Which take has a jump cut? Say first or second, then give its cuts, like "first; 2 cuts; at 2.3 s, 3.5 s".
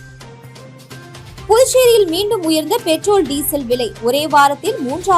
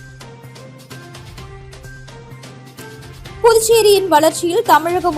second; 1 cut; at 1.4 s